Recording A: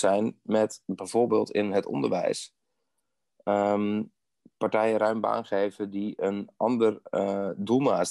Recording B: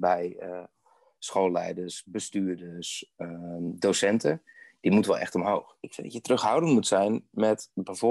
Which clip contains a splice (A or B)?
B